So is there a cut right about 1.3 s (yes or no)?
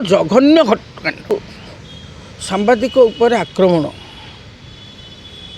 yes